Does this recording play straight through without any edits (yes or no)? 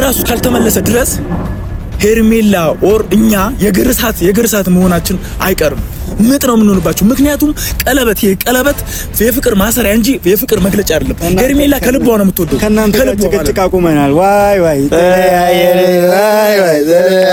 yes